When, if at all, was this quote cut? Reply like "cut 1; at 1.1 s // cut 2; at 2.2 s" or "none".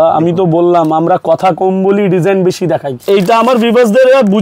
cut 1; at 3.0 s

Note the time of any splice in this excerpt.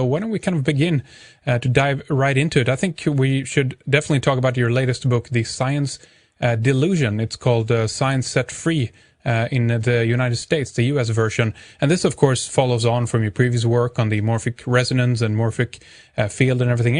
none

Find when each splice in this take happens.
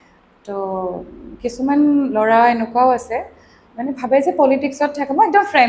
none

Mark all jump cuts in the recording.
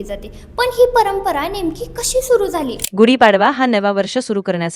cut 1; at 2.8 s

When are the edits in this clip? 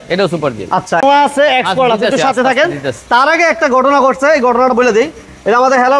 cut 1; at 1.0 s

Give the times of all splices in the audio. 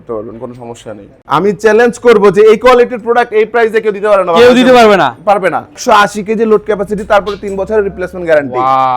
cut 1; at 1.1 s // cut 2; at 5.8 s

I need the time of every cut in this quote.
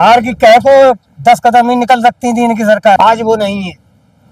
cut 1; at 3.0 s

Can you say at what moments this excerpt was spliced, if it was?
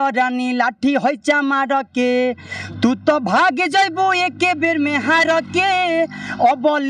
none

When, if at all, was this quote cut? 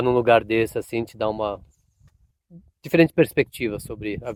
none

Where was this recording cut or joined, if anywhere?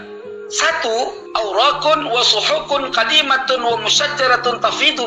cut 1; at 1.2 s

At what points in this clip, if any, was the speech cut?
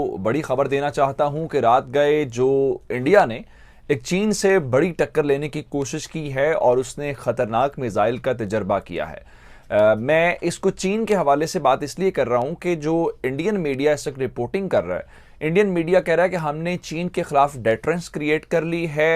none

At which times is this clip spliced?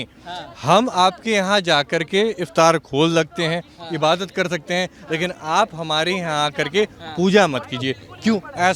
none

